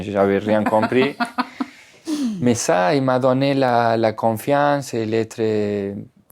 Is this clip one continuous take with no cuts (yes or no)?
yes